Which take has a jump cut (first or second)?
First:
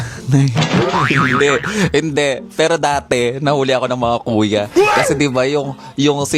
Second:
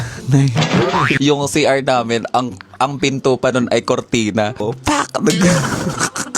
second